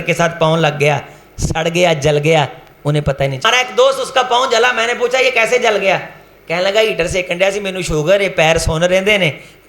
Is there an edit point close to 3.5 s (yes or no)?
yes